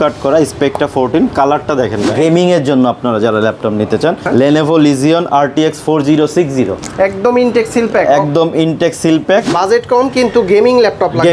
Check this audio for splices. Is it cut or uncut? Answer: cut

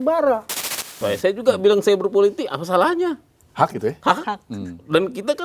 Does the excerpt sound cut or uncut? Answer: cut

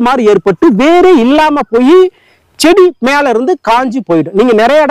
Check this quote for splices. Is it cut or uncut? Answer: uncut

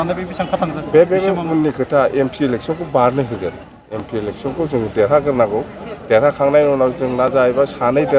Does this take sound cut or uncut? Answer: uncut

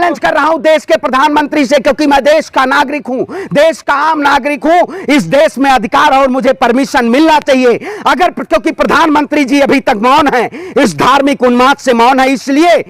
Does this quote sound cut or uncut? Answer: uncut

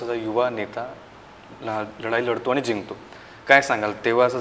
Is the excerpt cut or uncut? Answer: uncut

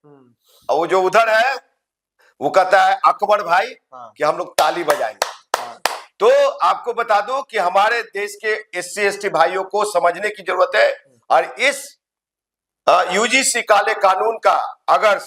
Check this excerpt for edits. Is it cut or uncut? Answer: uncut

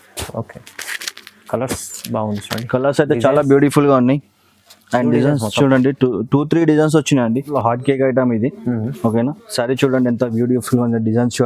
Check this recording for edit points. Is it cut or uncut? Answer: cut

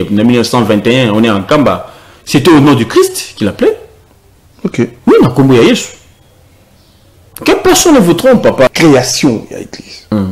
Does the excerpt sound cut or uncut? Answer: cut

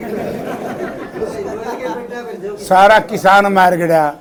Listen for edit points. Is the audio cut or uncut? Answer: uncut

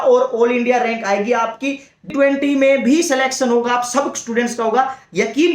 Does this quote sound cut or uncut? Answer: cut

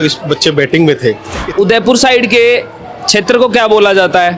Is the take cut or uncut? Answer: cut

